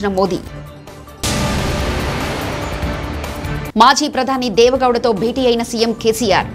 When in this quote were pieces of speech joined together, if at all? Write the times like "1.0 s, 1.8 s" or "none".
none